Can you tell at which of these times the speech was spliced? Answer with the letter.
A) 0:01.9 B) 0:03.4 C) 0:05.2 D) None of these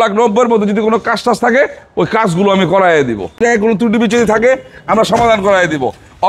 B